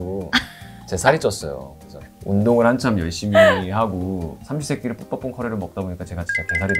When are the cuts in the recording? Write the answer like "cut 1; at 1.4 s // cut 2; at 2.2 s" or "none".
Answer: cut 1; at 4.4 s